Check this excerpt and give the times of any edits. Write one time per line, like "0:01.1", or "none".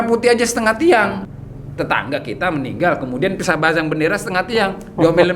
0:01.2

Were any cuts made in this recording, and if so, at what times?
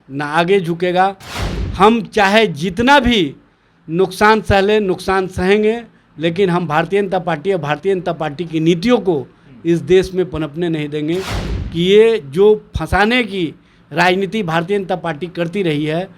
0:11.4

